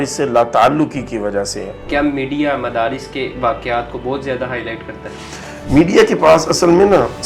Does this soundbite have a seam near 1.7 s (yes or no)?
yes